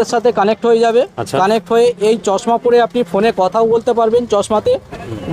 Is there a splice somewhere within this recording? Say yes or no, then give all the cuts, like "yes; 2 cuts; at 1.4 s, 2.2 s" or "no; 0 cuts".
no; 0 cuts